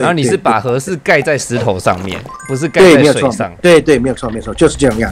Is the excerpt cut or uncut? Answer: uncut